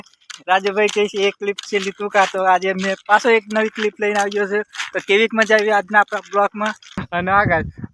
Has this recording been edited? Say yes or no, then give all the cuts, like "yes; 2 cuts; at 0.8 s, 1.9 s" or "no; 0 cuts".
yes; 1 cut; at 7.0 s